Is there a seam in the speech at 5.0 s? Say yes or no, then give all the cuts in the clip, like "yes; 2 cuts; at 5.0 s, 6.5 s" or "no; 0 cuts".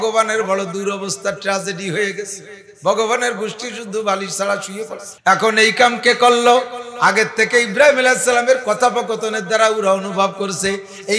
yes; 1 cut; at 5.0 s